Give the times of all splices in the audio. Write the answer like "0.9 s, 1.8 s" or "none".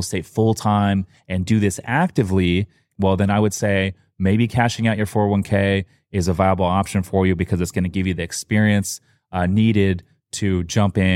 2.8 s